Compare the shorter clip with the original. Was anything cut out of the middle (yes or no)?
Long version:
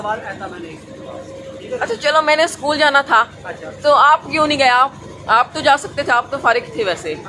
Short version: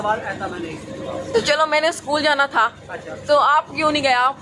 yes